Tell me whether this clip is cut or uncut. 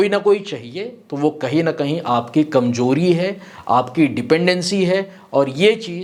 uncut